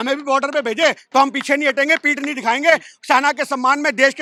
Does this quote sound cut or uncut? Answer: uncut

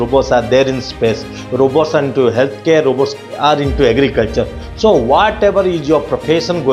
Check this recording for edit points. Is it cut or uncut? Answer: uncut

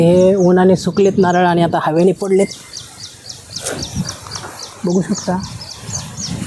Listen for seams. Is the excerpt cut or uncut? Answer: uncut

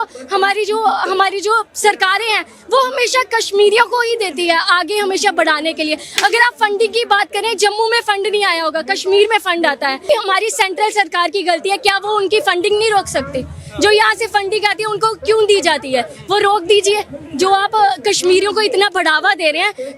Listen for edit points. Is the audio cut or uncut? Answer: cut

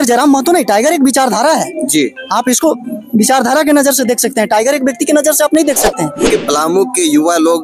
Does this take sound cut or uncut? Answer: cut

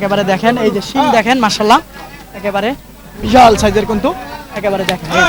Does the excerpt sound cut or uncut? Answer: uncut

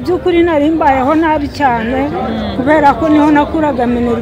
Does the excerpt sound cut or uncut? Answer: uncut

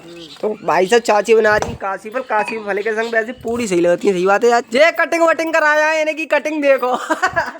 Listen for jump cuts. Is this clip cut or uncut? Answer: cut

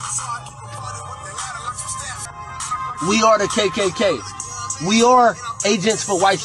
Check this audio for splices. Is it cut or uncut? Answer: cut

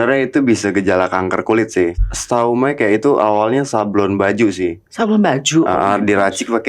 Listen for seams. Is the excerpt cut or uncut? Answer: cut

